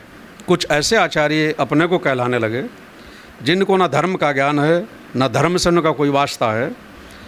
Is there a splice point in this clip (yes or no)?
no